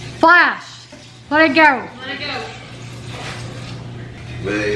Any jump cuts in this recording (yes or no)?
no